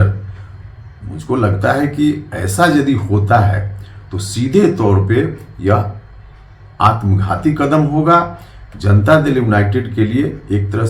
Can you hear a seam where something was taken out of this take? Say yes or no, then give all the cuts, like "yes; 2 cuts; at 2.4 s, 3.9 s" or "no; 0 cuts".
no; 0 cuts